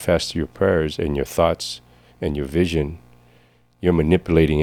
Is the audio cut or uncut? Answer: uncut